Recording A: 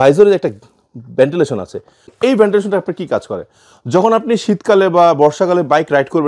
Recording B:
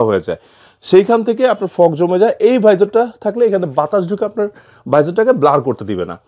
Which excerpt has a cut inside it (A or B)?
A